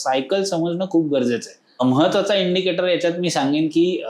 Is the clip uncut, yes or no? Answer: no